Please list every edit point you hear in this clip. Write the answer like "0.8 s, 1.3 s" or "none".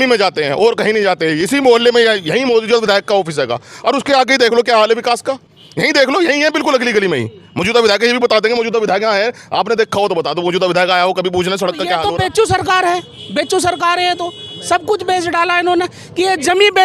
12.0 s